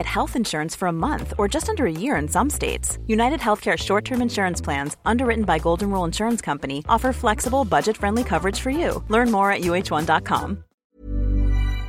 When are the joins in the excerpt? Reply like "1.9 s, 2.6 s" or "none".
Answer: 10.8 s